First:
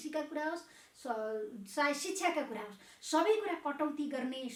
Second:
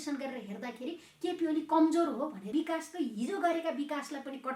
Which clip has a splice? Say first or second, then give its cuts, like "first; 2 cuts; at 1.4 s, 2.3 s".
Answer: second; 1 cut; at 2.4 s